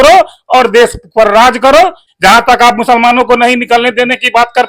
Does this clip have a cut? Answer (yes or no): yes